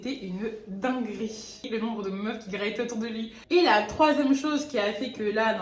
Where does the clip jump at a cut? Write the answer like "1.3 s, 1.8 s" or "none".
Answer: 1.7 s, 3.4 s